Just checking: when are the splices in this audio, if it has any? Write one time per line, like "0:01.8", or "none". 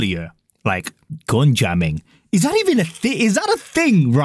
none